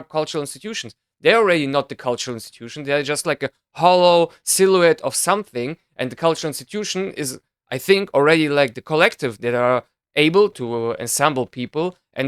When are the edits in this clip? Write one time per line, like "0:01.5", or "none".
0:10.6